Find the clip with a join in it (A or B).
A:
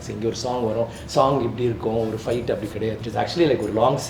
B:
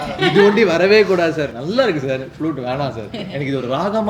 A